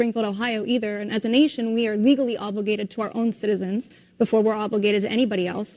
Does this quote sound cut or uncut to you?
uncut